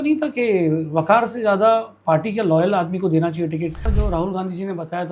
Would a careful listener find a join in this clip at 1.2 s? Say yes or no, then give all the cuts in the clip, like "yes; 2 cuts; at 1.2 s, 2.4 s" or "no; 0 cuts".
no; 1 cut; at 3.9 s